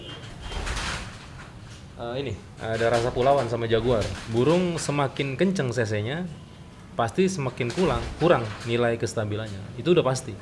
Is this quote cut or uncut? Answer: cut